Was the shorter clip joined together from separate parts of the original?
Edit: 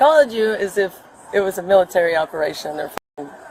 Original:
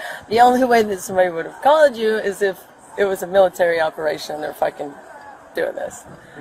no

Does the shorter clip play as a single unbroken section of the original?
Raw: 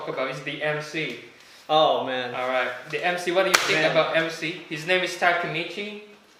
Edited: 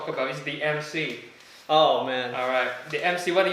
yes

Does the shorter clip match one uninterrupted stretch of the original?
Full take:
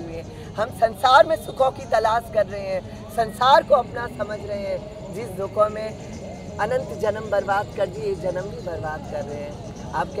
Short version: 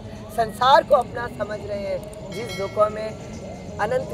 yes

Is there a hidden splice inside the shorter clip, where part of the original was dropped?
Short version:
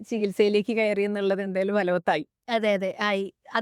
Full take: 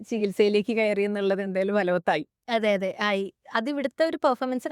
no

